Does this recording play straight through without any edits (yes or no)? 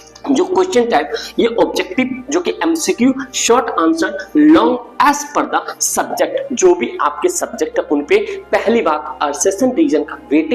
yes